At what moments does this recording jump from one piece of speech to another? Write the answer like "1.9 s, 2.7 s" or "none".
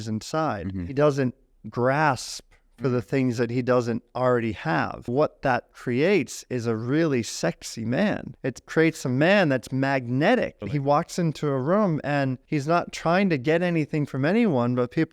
0.9 s, 5.1 s, 8.3 s, 10.7 s, 12.4 s